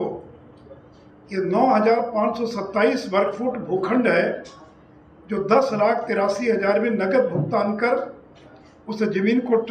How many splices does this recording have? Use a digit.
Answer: 0